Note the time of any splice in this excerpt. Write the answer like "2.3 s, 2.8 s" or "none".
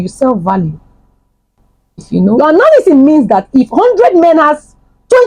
2.4 s